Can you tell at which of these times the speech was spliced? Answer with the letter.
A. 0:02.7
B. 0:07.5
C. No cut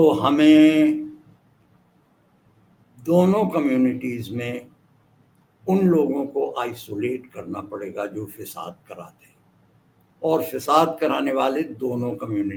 C